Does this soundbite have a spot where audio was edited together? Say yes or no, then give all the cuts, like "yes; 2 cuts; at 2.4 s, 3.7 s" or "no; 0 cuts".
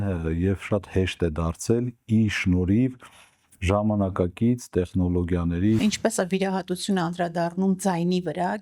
yes; 1 cut; at 5.8 s